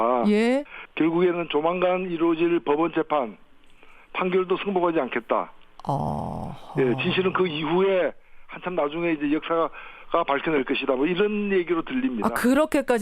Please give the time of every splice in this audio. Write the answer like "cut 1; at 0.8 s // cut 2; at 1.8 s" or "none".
cut 1; at 10.4 s

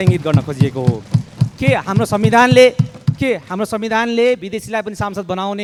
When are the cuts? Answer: none

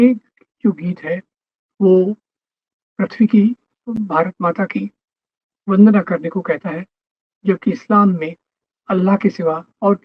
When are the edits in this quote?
none

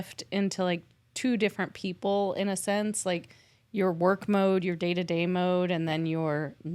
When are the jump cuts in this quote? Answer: none

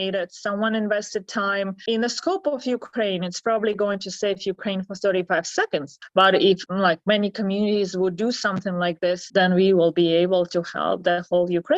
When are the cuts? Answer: cut 1; at 1.8 s // cut 2; at 6.6 s // cut 3; at 9.2 s

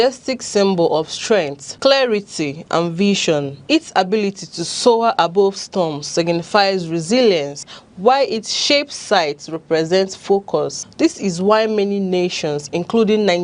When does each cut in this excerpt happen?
none

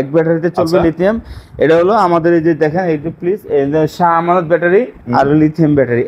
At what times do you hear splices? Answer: none

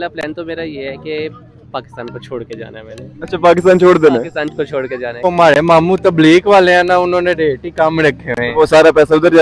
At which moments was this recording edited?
cut 1; at 5.2 s

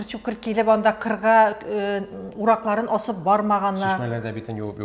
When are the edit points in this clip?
none

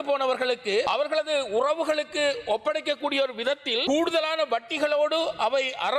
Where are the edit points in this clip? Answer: cut 1; at 3.9 s

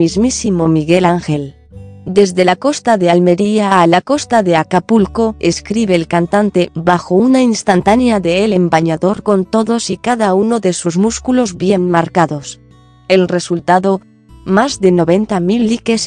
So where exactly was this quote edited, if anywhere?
cut 1; at 8.1 s

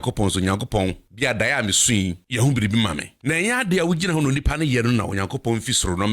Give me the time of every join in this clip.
cut 1; at 1.1 s // cut 2; at 2.2 s // cut 3; at 3.1 s

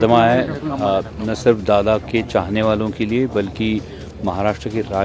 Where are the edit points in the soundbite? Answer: none

